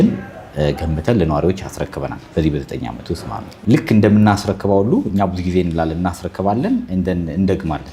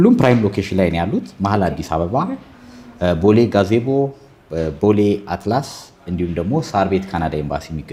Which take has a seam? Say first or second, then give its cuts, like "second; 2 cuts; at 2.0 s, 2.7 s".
first; 1 cut; at 3.6 s